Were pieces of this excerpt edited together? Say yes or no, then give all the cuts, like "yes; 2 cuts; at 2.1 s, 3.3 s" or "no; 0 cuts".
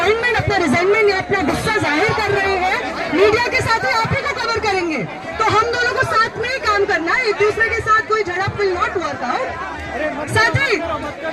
no; 0 cuts